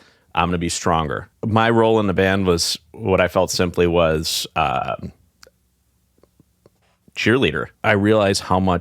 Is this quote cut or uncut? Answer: cut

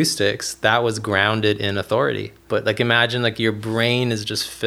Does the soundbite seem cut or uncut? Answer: cut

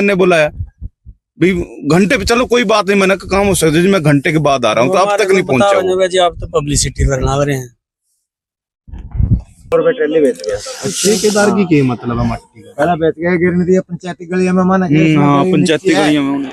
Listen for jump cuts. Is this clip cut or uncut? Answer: uncut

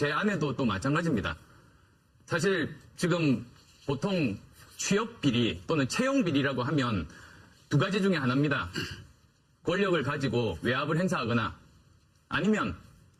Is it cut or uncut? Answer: cut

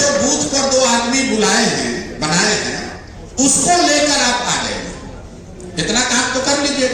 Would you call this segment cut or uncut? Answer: uncut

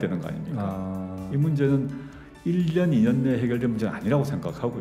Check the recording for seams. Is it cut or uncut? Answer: uncut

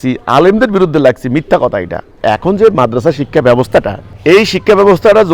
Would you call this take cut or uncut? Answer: cut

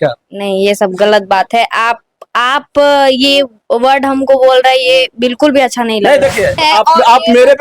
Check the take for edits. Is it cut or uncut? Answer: cut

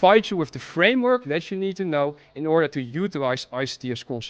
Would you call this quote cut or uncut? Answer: uncut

